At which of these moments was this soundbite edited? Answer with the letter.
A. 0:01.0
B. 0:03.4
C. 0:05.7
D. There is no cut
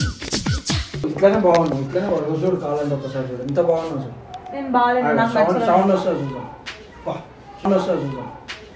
A